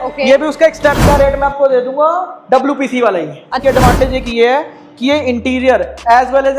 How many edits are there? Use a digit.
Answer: 2